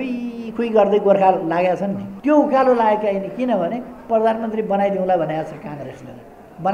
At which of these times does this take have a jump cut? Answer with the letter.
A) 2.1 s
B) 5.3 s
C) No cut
A